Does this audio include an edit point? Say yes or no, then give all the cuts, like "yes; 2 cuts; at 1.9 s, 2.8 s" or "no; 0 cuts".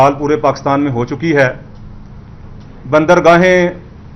no; 0 cuts